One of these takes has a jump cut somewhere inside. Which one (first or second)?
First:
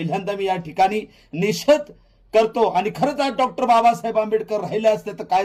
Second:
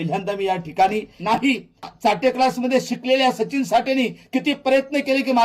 second